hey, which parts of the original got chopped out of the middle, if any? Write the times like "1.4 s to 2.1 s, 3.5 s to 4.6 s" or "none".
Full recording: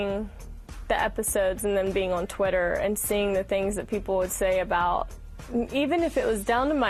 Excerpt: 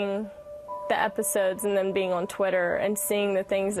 none